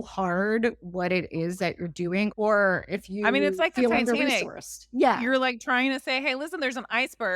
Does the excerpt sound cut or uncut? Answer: cut